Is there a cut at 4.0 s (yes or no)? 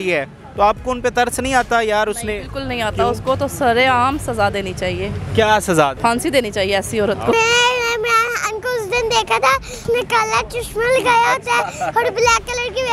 no